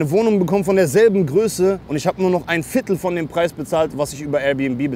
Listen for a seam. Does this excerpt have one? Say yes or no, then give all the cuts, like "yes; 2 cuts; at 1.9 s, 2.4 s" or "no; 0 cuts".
yes; 1 cut; at 1.9 s